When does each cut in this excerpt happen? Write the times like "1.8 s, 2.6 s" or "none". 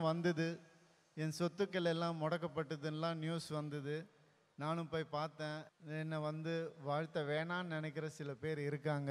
5.7 s